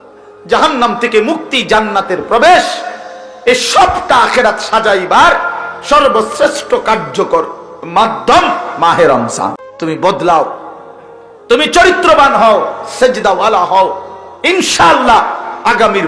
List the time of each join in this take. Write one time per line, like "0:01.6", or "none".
0:09.7